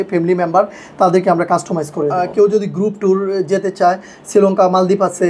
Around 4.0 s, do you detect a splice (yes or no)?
no